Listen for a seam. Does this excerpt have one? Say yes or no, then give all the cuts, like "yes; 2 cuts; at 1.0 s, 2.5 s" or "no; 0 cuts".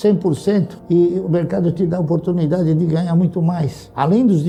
no; 0 cuts